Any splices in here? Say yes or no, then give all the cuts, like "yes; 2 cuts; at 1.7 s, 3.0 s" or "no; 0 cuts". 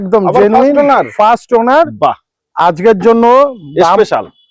no; 0 cuts